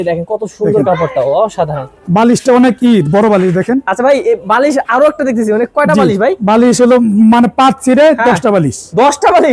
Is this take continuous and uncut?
yes; 0 cuts

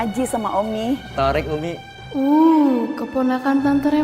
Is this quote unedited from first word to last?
no; 2 cuts; at 1.1 s, 1.9 s

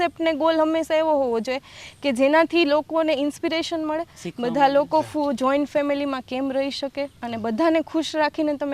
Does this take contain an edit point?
no; 0 cuts

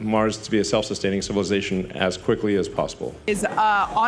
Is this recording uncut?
no; 1 cut; at 3.2 s

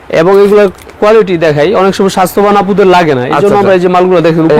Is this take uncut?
yes; 0 cuts

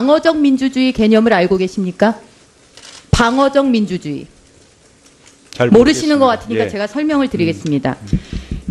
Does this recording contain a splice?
no; 0 cuts

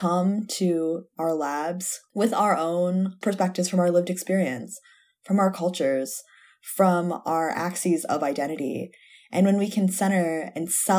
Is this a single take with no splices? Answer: no; 2 cuts; at 1.9 s, 3.2 s

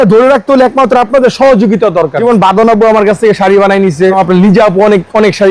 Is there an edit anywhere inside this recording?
yes; 2 cuts; at 2.2 s, 4.2 s

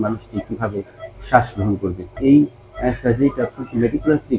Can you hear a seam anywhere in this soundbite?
yes; 1 cut; at 2.1 s

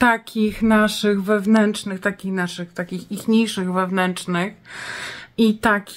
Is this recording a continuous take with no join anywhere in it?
yes; 0 cuts

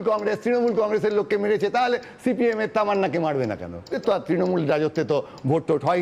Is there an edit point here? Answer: yes; 1 cut; at 3.9 s

